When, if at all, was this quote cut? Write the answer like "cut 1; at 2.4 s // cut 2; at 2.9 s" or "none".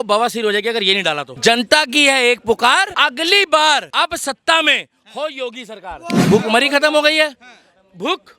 cut 1; at 1.3 s // cut 2; at 2.9 s // cut 3; at 3.9 s // cut 4; at 6.2 s